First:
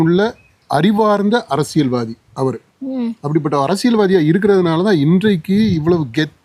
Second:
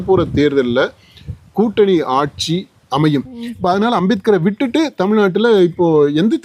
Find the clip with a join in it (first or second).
second